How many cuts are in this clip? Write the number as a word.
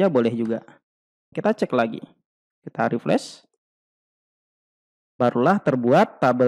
one